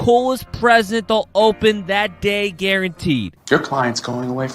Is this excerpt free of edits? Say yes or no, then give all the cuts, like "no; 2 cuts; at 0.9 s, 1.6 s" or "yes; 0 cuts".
no; 1 cut; at 3.3 s